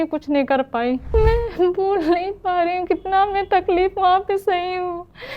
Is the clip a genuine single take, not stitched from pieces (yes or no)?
no